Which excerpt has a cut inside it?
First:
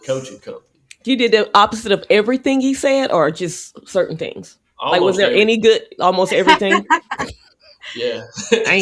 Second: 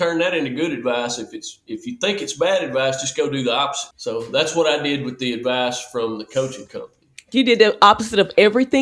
second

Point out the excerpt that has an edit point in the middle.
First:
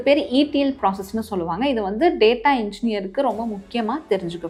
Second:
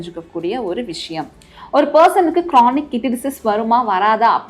second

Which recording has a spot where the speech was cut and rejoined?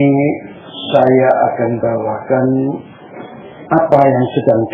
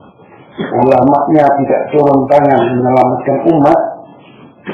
second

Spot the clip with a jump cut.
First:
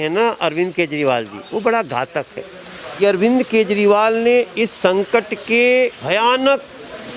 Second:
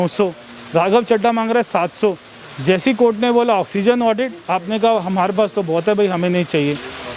first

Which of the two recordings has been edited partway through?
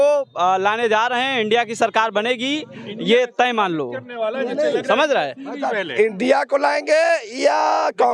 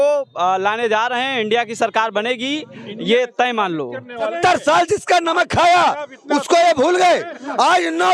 second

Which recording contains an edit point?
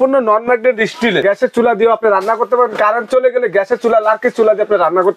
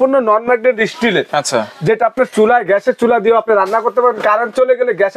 first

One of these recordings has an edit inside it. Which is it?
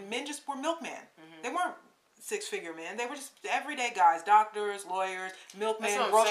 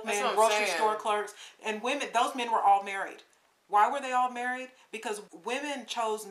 second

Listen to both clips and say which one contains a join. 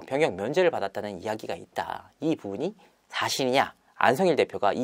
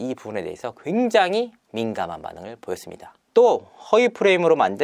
first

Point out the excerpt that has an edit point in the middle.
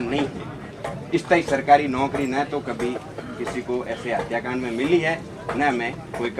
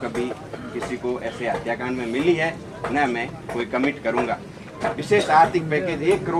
second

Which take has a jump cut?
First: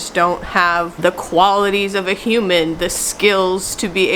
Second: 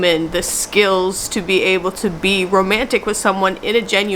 first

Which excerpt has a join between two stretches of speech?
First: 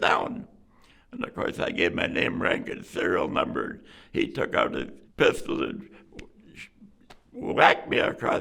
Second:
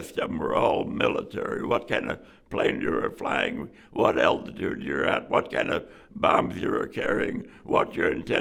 first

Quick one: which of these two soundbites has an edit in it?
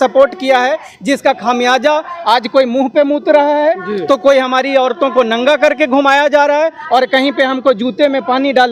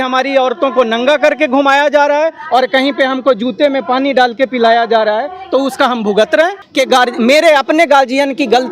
second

